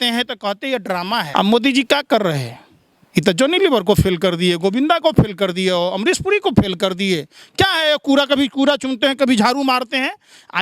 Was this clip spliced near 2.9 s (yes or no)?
no